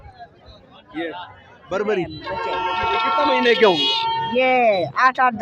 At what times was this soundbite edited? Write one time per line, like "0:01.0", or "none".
0:02.3